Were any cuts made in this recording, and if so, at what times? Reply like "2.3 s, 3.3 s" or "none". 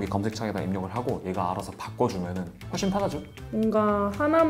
3.3 s